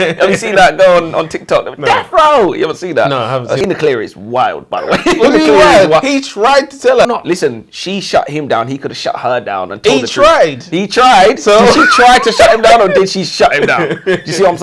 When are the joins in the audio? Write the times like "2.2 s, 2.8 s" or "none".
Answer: 3.7 s, 7.1 s